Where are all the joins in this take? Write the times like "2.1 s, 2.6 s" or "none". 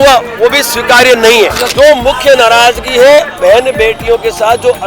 1.6 s